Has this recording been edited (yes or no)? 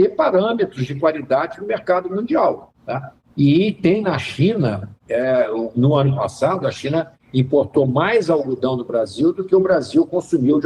no